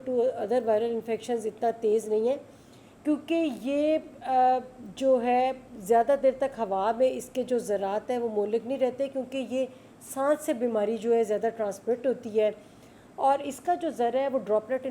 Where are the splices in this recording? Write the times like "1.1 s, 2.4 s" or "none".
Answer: none